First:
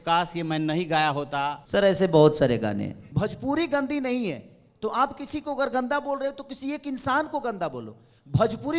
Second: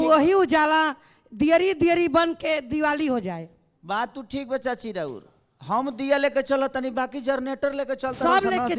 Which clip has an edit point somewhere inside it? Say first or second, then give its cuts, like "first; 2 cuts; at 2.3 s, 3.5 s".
first; 2 cuts; at 1.6 s, 3.0 s